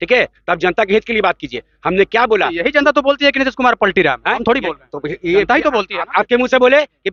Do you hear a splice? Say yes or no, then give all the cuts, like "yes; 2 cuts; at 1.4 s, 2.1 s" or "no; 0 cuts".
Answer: no; 0 cuts